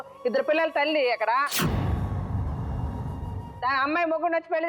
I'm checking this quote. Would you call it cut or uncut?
cut